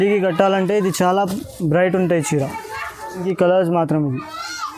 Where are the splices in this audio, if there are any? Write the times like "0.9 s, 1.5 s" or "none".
none